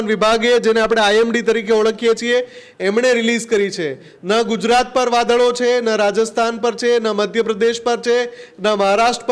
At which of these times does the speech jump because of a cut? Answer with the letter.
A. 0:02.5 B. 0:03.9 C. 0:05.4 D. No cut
D